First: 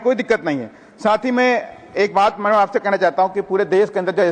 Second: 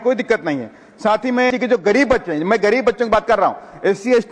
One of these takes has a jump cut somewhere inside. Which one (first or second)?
second